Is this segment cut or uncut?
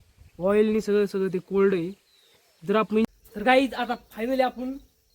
cut